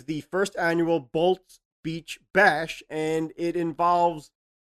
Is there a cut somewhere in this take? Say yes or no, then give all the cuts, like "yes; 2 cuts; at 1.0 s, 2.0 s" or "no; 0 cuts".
yes; 1 cut; at 2.8 s